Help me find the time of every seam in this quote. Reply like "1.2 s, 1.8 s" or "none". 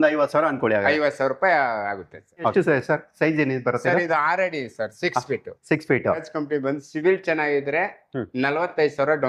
2.5 s, 6.2 s